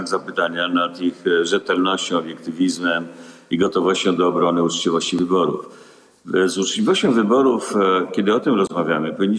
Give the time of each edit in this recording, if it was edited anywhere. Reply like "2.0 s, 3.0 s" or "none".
none